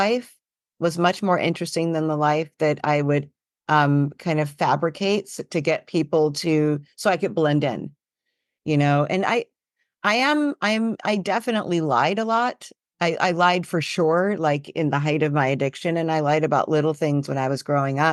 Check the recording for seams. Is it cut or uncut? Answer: uncut